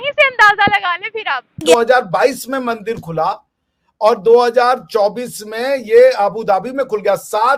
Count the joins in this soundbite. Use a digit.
1